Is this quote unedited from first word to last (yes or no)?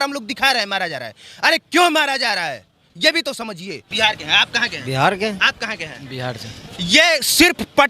no